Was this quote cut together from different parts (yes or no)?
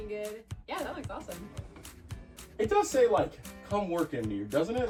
no